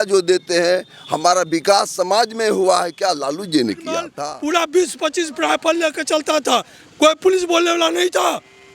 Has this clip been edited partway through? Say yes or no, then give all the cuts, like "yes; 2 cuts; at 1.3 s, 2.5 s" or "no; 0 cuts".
yes; 1 cut; at 4.0 s